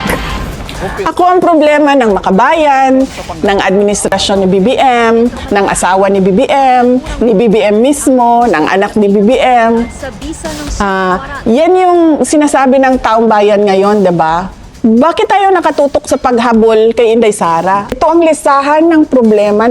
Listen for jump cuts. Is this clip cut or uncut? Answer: cut